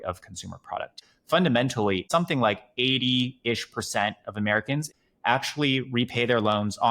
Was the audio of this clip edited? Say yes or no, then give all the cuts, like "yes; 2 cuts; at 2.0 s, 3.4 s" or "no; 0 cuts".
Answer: yes; 3 cuts; at 1.0 s, 2.0 s, 4.9 s